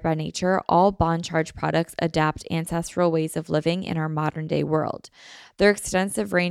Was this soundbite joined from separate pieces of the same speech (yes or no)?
no